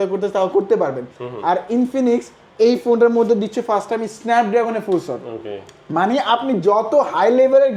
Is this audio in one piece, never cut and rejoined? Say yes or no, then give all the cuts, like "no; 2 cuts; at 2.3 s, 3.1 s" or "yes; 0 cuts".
yes; 0 cuts